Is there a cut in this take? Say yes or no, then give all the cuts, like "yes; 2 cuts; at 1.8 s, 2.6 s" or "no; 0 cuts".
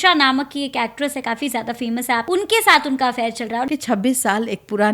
yes; 2 cuts; at 2.2 s, 3.7 s